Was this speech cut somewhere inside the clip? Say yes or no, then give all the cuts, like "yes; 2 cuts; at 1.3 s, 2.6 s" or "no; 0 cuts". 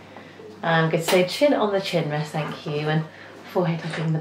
no; 0 cuts